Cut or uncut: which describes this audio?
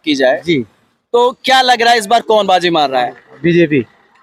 uncut